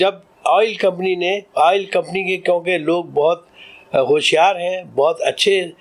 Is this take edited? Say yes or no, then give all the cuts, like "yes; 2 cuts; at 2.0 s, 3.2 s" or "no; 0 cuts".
no; 0 cuts